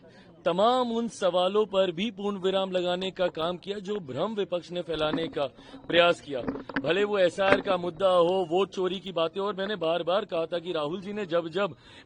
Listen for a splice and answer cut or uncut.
uncut